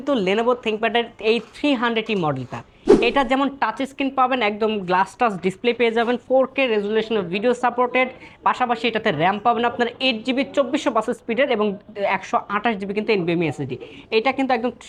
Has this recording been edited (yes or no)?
no